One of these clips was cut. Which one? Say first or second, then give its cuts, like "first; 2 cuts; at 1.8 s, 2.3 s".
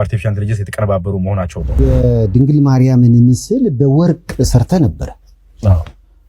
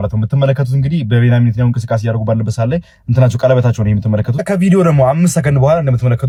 first; 1 cut; at 1.6 s